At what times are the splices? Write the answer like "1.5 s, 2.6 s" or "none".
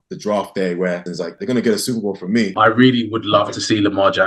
1.1 s, 2.5 s